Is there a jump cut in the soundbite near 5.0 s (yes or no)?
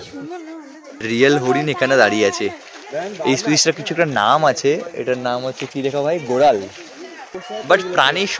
no